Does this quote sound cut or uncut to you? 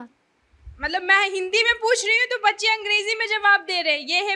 uncut